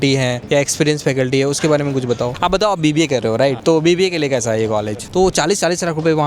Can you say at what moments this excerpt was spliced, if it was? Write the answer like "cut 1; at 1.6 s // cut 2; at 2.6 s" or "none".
cut 1; at 2.3 s // cut 2; at 3.6 s // cut 3; at 5.0 s